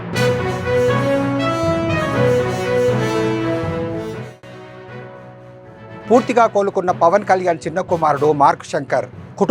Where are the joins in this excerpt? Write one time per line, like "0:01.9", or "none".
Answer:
0:05.9